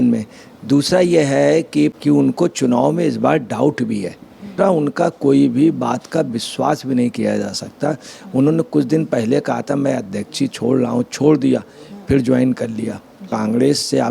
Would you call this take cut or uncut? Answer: cut